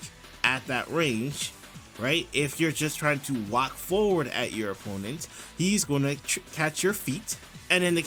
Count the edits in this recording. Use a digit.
0